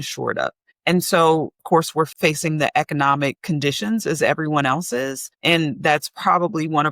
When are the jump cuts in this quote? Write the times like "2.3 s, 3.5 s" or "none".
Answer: 1.8 s, 3.4 s